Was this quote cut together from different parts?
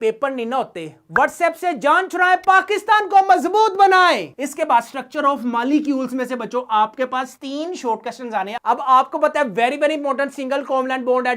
no; 0 cuts

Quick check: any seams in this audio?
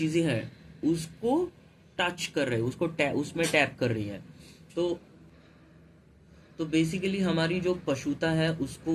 no; 0 cuts

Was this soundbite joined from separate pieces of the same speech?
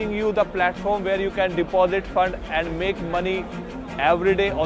no; 0 cuts

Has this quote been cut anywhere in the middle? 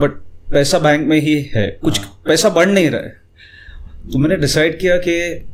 no; 0 cuts

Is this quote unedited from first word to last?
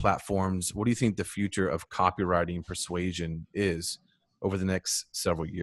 yes; 0 cuts

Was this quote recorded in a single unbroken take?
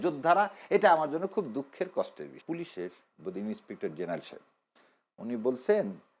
no; 1 cut; at 2.4 s

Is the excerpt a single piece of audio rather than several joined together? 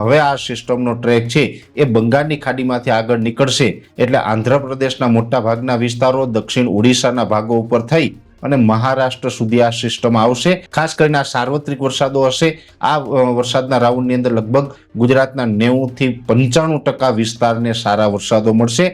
no; 1 cut; at 10.7 s

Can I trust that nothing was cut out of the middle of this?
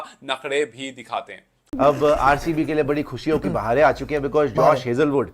no; 1 cut; at 1.5 s

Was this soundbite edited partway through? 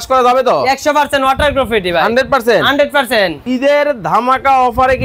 yes; 1 cut; at 3.4 s

